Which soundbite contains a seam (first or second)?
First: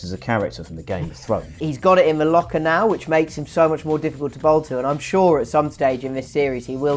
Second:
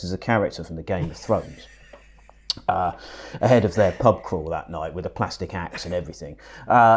first